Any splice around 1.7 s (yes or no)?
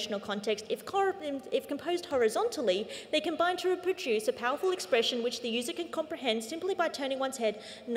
no